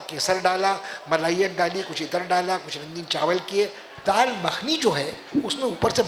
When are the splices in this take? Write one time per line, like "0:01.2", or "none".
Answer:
0:04.0